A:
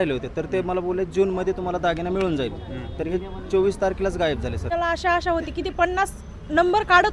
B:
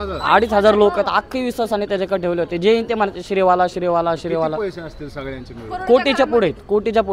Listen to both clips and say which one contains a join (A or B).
A